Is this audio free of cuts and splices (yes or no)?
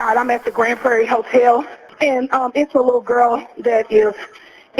no